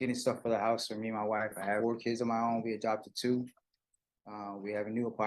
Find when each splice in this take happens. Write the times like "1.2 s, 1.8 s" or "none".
1.8 s